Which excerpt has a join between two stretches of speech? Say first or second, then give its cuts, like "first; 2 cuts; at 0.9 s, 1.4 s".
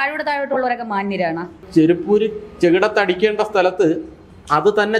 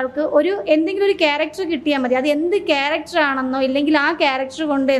first; 1 cut; at 1.6 s